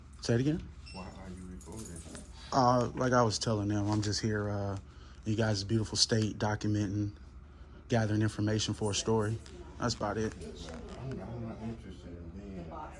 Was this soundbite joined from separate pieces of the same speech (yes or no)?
no